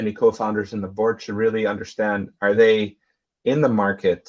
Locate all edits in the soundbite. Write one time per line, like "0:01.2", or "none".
none